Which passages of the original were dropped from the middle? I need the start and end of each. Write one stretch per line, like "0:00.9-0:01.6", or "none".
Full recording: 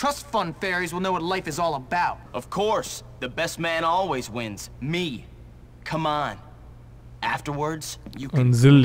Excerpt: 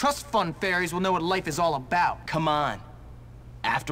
0:02.2-0:05.8